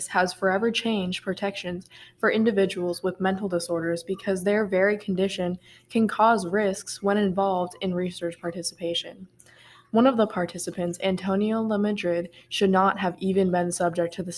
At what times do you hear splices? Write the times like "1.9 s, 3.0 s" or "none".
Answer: none